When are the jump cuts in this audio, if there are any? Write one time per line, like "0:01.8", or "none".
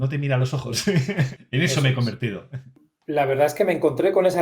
0:02.9